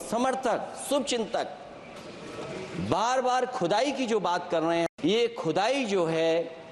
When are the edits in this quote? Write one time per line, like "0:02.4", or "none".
0:04.9